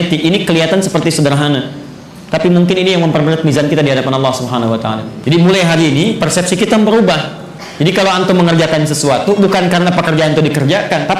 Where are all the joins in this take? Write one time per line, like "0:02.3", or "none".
0:05.1